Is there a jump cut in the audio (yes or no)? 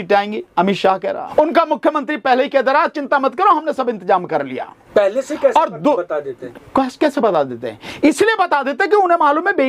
yes